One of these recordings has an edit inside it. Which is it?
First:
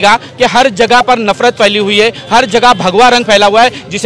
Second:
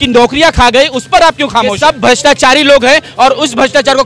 second; 1 cut; at 1.7 s

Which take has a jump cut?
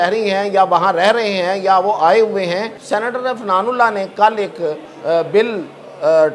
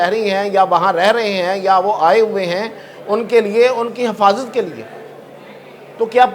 first; 2 cuts; at 2.7 s, 4.9 s

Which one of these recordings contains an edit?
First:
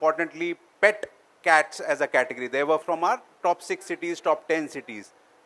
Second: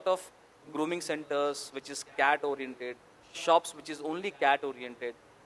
first; 1 cut; at 2.8 s

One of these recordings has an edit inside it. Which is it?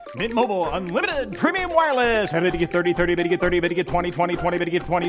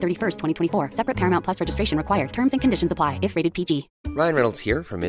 second; 1 cut; at 4.0 s

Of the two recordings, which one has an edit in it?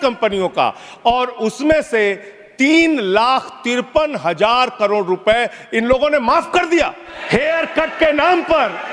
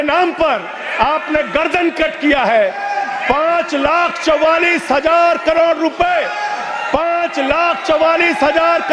first; 1 cut; at 7.1 s

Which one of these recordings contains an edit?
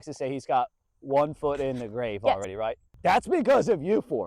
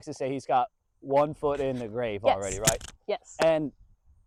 first; 1 cut; at 2.5 s

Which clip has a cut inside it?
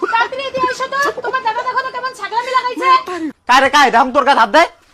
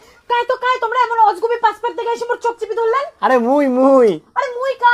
first; 1 cut; at 3.3 s

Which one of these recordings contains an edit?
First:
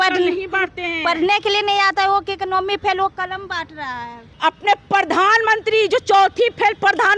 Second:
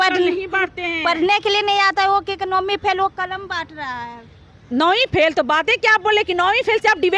first; 1 cut; at 4.2 s

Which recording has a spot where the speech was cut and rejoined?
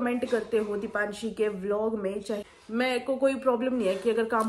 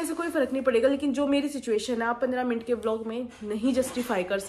first; 1 cut; at 2.4 s

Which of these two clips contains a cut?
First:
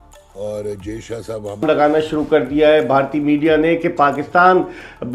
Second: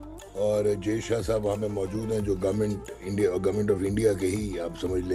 first; 1 cut; at 1.6 s

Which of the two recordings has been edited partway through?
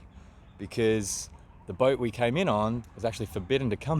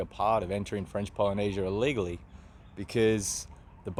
first; 1 cut; at 2.9 s

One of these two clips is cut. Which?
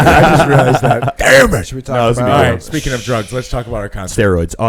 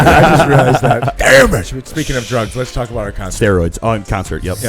second; 1 cut; at 1.9 s

